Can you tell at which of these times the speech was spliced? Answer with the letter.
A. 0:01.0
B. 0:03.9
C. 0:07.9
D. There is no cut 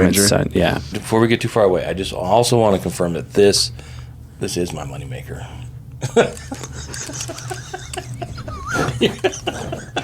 A